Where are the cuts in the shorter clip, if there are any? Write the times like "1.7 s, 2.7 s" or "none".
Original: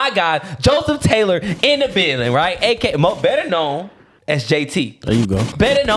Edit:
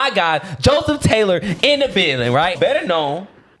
2.5 s